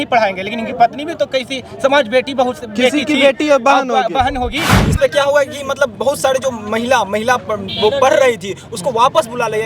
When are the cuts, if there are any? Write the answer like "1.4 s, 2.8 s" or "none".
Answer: 4.8 s